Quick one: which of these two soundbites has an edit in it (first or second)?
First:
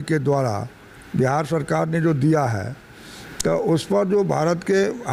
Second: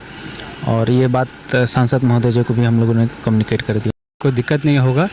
second